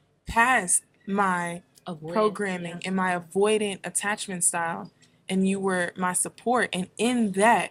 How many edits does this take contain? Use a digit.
0